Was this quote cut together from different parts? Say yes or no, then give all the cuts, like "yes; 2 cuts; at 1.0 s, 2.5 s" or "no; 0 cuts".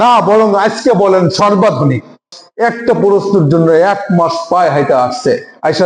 yes; 1 cut; at 2.4 s